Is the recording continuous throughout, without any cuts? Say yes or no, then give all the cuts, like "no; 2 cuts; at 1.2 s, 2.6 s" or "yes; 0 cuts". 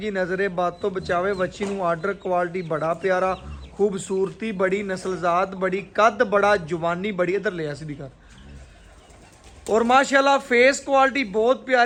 yes; 0 cuts